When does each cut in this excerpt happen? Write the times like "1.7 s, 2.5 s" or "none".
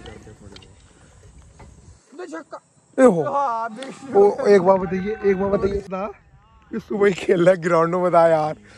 5.9 s